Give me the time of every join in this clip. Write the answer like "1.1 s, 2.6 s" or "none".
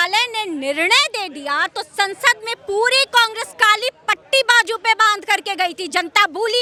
none